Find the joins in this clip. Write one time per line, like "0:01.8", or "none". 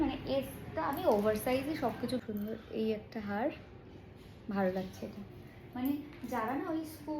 0:02.2